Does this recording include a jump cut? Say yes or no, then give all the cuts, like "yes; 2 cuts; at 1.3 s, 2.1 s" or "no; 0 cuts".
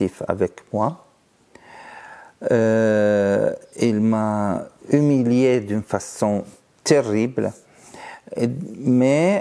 no; 0 cuts